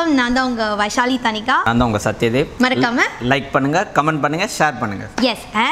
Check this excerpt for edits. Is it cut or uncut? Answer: cut